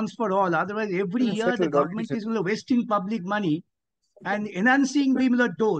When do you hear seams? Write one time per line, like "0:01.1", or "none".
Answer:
none